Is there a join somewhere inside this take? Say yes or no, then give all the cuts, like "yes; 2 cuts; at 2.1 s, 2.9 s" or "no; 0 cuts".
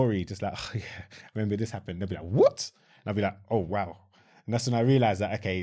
no; 0 cuts